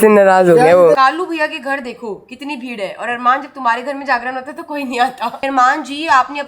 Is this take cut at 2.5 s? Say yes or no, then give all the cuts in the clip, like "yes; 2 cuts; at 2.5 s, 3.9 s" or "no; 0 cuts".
no; 2 cuts; at 1.0 s, 5.4 s